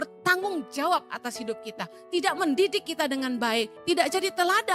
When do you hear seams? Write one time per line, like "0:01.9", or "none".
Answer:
0:03.7